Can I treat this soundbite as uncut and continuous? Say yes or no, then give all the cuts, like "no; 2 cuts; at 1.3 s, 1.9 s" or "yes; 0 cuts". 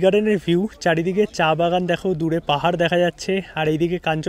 yes; 0 cuts